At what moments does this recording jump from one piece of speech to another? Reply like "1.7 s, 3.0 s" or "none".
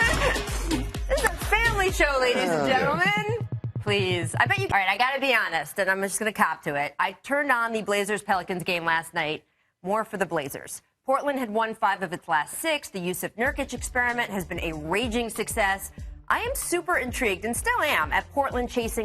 none